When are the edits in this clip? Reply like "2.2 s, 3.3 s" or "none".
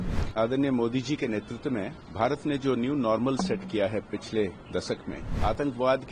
2.0 s, 5.3 s